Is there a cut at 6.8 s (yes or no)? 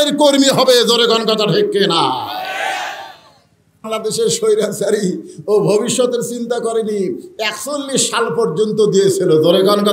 no